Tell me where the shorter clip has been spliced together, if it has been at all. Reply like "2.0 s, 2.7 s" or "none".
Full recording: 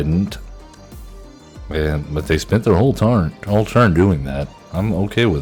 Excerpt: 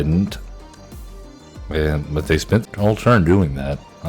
2.6 s